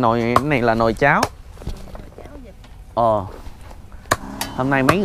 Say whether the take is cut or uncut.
uncut